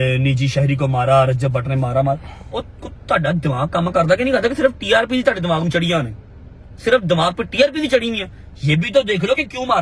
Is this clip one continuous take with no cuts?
yes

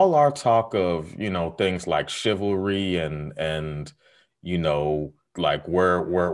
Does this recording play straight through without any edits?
no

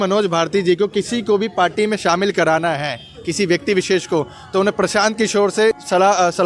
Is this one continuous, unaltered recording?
yes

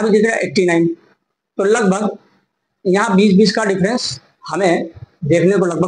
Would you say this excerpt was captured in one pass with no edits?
yes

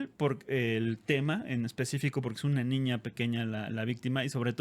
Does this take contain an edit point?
no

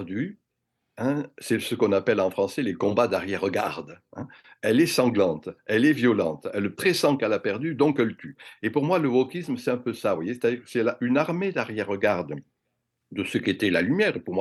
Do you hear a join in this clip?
no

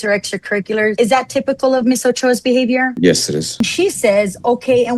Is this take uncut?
no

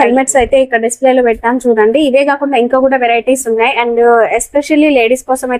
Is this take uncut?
yes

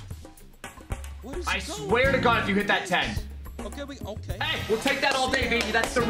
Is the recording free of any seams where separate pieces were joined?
yes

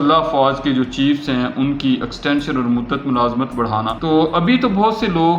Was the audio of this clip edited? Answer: yes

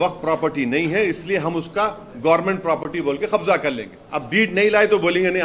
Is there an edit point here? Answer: yes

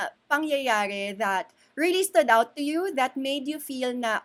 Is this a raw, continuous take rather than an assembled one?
yes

